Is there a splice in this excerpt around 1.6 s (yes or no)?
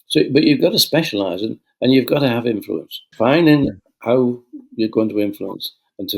no